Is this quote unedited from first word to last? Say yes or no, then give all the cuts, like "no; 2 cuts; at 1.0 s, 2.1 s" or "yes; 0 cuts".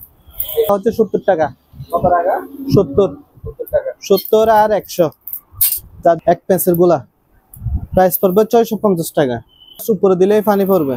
no; 3 cuts; at 0.7 s, 6.2 s, 9.8 s